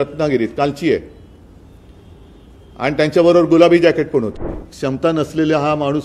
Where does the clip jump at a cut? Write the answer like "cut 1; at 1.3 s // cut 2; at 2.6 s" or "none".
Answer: cut 1; at 4.5 s